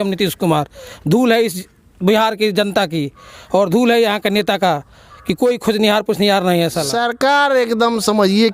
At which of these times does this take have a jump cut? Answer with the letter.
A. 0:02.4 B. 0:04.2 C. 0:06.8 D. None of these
C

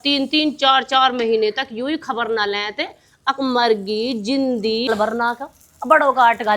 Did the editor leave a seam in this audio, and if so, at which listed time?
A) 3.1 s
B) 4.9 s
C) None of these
B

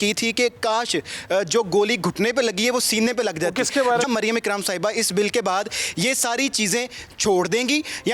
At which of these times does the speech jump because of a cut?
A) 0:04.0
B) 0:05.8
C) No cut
A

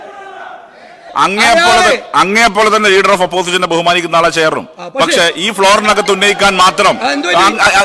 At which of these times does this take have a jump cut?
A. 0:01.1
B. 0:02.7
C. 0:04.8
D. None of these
A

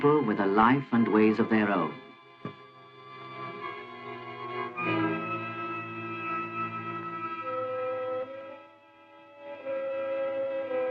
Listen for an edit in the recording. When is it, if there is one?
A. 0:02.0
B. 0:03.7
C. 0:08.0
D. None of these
D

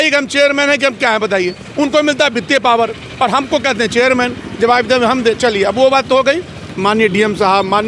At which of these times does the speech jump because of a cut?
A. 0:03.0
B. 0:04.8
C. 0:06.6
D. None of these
C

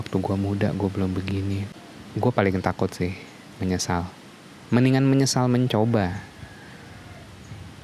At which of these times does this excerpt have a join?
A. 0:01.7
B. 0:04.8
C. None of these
A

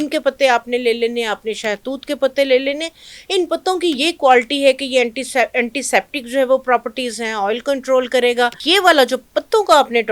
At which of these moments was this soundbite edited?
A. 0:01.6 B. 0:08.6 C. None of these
B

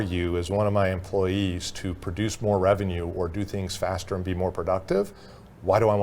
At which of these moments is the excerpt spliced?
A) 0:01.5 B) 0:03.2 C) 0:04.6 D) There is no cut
D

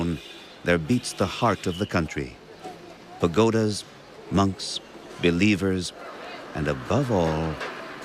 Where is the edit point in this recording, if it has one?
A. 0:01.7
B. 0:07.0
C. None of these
B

